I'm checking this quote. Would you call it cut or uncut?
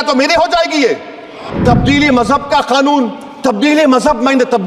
cut